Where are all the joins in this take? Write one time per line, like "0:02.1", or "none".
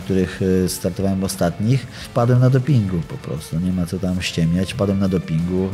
0:02.0